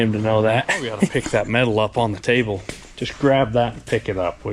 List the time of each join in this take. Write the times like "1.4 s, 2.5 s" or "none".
1.1 s